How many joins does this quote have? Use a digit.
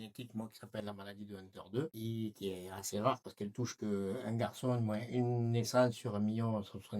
1